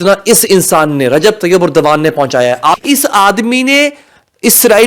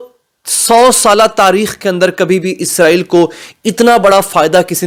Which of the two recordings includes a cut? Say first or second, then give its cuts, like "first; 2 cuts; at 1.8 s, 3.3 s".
first; 1 cut; at 2.8 s